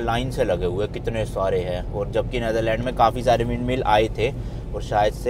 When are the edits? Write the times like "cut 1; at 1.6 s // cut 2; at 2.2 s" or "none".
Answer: none